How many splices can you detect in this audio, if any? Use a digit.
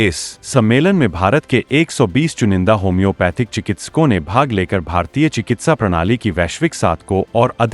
0